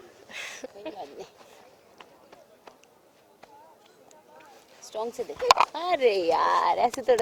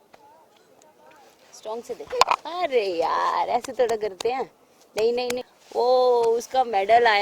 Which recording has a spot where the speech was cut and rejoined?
second; 1 cut; at 5.4 s

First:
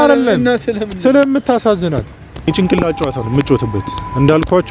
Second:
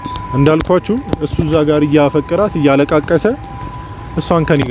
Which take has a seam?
first; 1 cut; at 2.5 s

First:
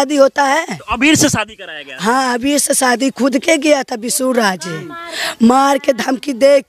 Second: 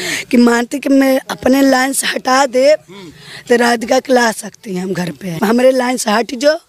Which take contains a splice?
second; 1 cut; at 5.4 s

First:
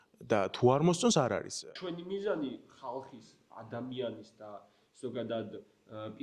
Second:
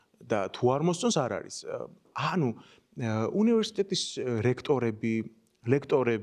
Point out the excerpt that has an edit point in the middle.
first; 1 cut; at 1.7 s

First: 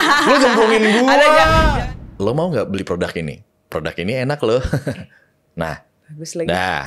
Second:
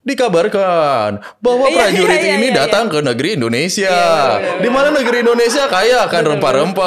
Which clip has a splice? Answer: first; 1 cut; at 1.7 s

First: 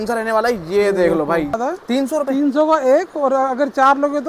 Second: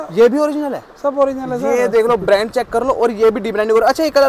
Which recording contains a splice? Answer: first; 1 cut; at 1.6 s

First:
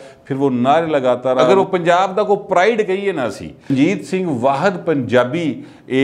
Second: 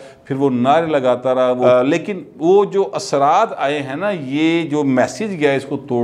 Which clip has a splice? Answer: first; 2 cuts; at 1.5 s, 3.7 s

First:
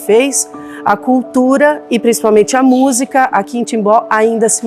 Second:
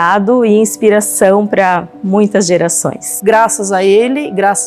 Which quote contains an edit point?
second; 1 cut; at 3.1 s

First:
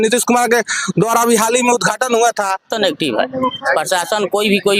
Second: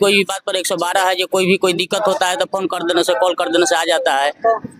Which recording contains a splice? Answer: first; 1 cut; at 2.7 s

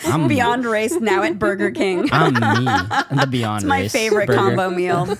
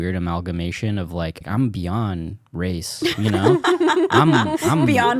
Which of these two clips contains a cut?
second; 1 cut; at 1.4 s

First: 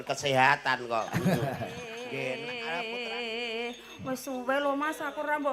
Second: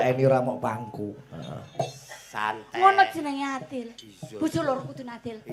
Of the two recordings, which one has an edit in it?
first; 1 cut; at 2.5 s

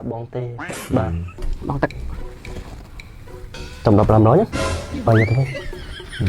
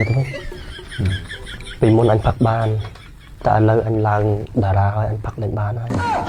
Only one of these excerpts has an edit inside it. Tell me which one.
first; 1 cut; at 1.3 s

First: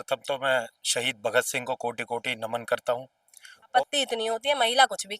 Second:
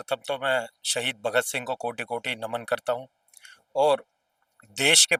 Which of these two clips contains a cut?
first; 1 cut; at 3.7 s

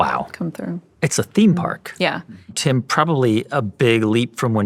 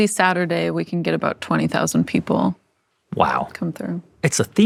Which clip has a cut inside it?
first; 1 cut; at 2.6 s

